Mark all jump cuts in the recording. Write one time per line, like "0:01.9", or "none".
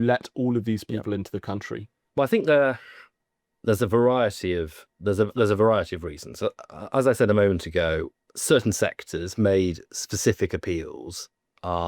none